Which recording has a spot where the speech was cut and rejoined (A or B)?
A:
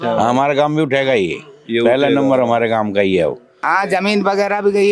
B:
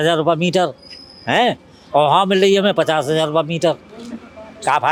A